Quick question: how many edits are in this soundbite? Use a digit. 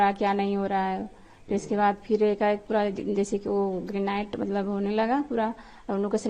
0